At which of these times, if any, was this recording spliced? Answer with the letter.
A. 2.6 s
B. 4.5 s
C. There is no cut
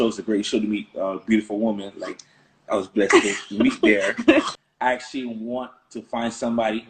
B